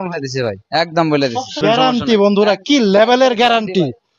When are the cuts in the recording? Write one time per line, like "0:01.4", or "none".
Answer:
0:01.6